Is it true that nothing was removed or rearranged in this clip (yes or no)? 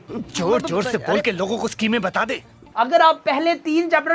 no